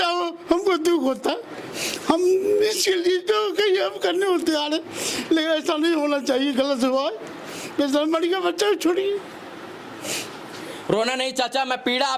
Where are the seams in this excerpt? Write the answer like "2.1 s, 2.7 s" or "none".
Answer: none